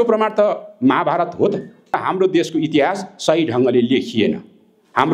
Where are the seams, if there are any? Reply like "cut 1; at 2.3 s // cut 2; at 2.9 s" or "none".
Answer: cut 1; at 2.0 s